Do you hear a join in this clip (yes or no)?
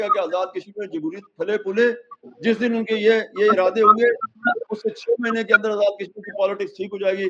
no